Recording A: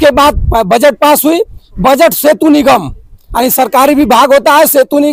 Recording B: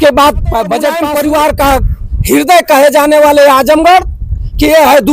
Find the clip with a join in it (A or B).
B